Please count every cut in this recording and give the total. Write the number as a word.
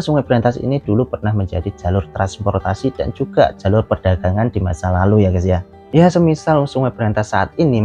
one